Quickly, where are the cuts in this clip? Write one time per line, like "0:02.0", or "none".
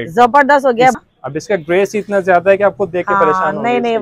0:00.9

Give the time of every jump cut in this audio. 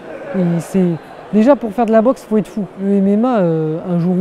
0:02.8

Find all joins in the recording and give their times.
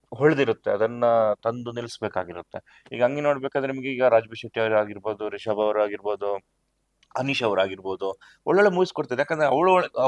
none

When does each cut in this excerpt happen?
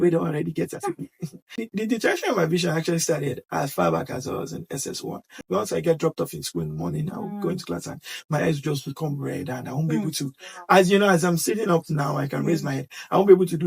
0:01.6
0:05.4

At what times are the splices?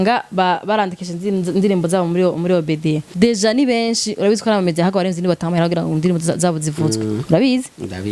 0:03.1

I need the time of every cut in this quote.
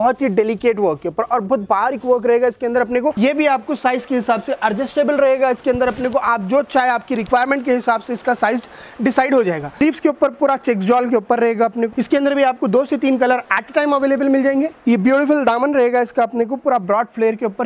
0:03.1
0:09.8
0:11.9
0:14.7

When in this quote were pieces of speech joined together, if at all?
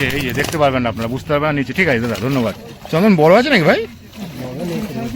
0:02.7

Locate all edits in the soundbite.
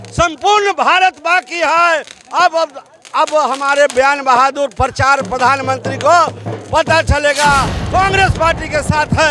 0:07.8

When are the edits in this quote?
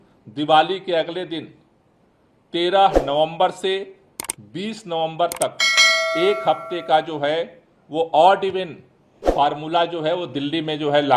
none

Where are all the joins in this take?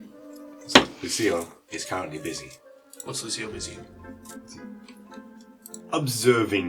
none

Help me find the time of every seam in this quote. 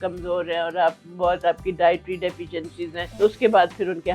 0:03.0

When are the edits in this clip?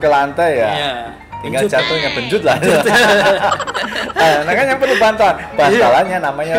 none

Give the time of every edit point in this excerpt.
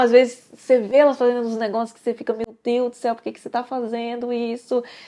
none

